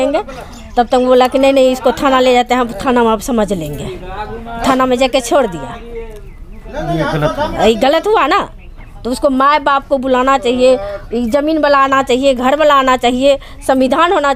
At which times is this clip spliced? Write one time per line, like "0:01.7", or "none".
none